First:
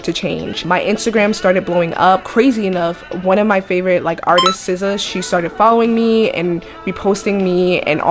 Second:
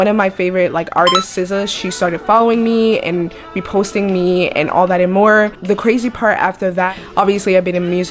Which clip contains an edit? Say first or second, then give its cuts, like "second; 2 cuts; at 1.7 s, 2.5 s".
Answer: second; 1 cut; at 6.9 s